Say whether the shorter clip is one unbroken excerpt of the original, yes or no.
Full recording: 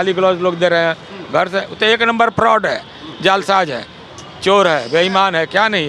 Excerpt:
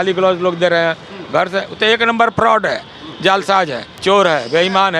no